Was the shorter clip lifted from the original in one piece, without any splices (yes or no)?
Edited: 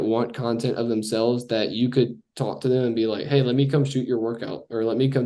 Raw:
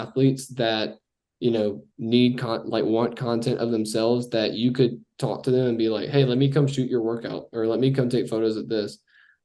yes